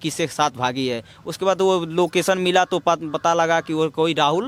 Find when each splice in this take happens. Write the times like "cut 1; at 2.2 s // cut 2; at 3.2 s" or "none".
none